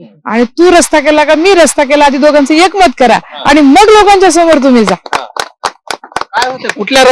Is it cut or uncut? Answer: uncut